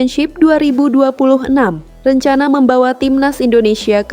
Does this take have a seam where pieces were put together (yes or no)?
yes